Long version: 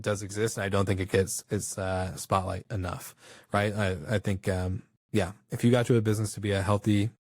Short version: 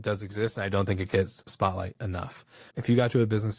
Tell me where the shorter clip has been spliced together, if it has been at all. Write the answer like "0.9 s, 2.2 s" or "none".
1.4 s, 2.7 s